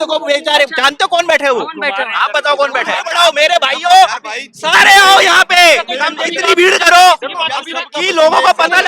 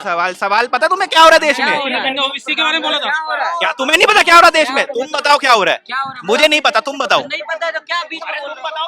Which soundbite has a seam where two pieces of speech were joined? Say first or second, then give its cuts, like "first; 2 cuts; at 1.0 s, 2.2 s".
first; 1 cut; at 3.1 s